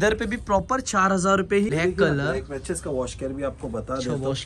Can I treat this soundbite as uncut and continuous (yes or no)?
no